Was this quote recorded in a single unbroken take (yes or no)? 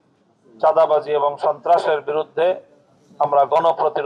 yes